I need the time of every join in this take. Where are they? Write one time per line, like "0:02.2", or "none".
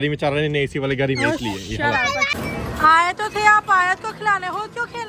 0:02.3